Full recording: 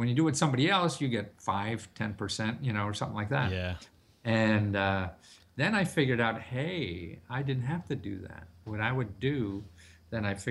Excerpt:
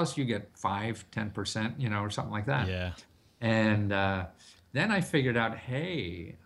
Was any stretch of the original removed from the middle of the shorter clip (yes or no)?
no